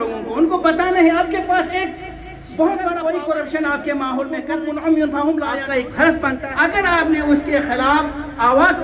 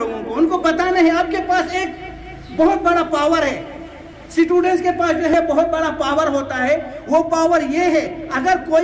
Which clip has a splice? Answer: first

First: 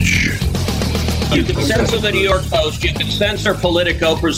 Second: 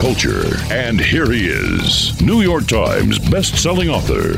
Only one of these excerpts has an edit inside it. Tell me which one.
first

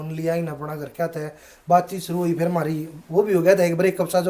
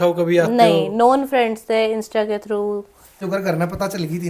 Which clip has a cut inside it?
second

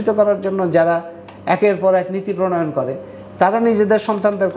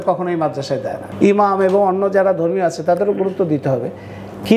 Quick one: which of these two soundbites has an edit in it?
second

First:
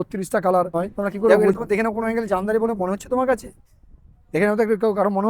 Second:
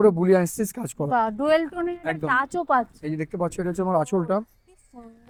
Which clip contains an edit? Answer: first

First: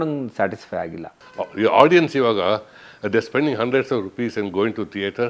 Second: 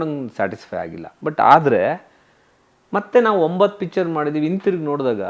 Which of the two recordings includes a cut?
first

